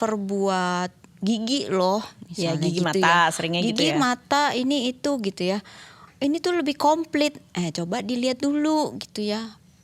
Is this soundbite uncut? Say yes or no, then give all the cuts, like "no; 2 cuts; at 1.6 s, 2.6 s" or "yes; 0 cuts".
yes; 0 cuts